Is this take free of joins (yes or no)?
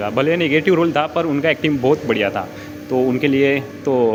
yes